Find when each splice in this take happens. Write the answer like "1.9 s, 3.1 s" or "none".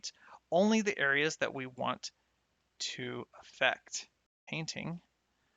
4.4 s